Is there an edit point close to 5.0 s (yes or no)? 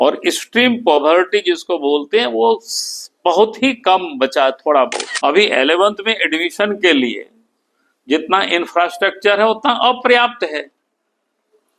yes